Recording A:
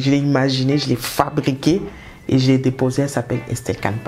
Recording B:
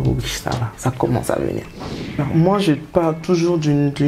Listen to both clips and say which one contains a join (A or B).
B